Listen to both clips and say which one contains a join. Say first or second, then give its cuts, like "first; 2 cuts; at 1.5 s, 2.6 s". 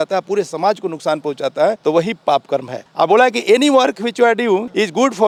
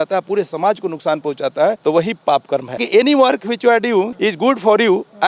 second; 1 cut; at 2.8 s